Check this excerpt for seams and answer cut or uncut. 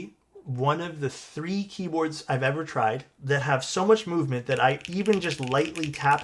cut